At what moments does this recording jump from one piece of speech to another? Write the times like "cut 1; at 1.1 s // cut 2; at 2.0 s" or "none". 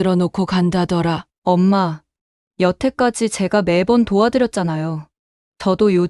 cut 1; at 1.3 s